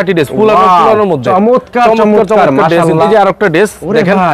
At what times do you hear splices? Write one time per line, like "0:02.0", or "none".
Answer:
0:03.1